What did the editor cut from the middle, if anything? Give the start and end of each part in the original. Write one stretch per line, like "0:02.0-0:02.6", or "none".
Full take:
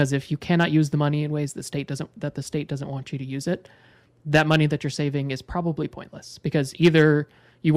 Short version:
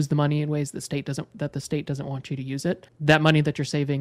0:03.7-0:04.2